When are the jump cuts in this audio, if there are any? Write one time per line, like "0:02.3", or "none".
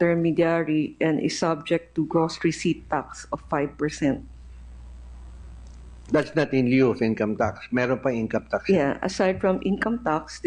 none